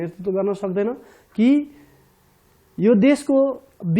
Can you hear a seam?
no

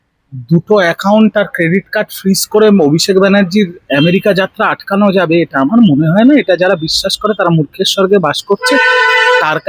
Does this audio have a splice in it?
no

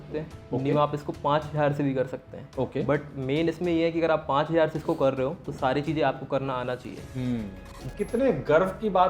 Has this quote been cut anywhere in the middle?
yes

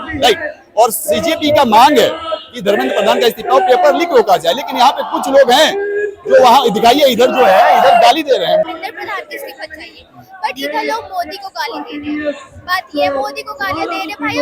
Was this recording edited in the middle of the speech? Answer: yes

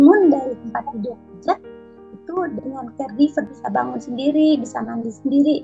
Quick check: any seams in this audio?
yes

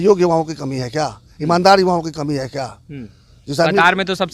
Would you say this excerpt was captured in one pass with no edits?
yes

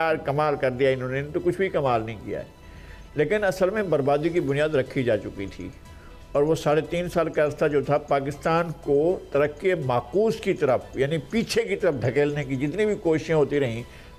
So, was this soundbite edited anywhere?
no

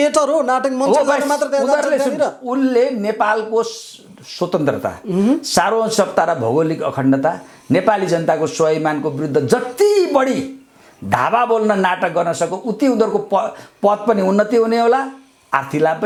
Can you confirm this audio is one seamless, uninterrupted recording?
yes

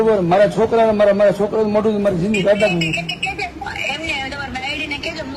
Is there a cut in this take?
no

